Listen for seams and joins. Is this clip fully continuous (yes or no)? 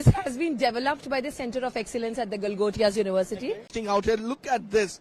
no